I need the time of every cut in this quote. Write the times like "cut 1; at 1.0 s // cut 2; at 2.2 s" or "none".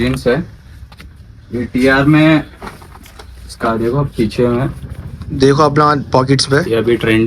none

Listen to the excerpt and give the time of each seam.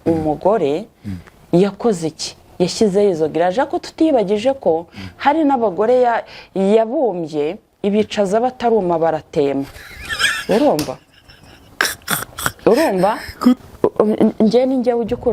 cut 1; at 13.6 s

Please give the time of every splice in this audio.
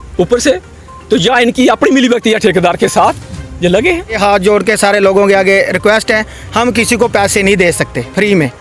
cut 1; at 4.2 s

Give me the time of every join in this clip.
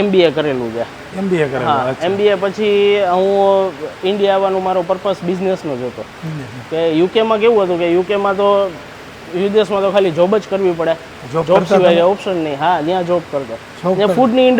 none

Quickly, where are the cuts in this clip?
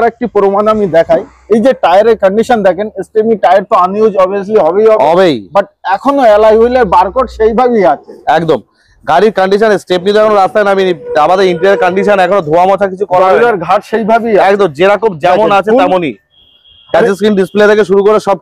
none

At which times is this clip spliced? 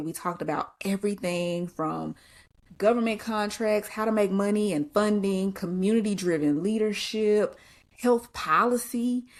none

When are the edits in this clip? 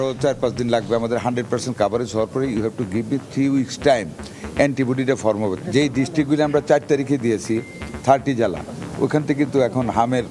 none

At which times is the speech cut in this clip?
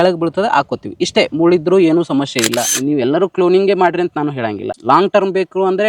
cut 1; at 2.7 s // cut 2; at 4.7 s

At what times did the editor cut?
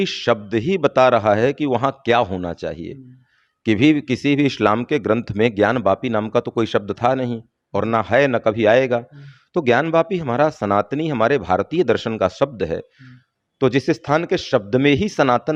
none

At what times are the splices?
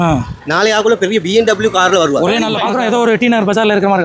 cut 1; at 2.6 s

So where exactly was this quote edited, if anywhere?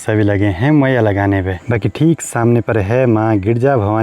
none

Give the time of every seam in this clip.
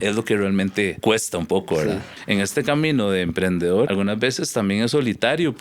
cut 1; at 1.0 s // cut 2; at 2.1 s // cut 3; at 3.9 s

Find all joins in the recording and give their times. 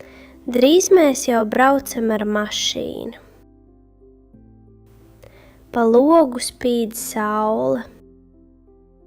cut 1; at 8.0 s

